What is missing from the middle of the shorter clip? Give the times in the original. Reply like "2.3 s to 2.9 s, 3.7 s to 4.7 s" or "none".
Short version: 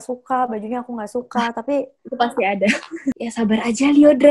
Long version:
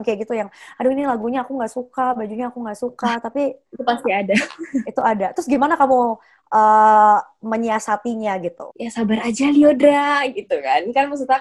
4.9 s to 8.8 s

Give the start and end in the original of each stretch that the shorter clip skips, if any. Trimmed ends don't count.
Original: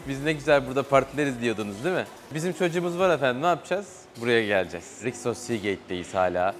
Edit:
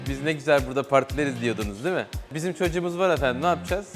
none

